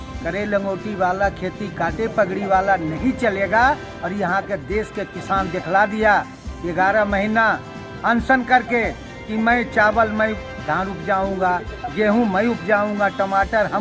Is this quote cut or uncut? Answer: uncut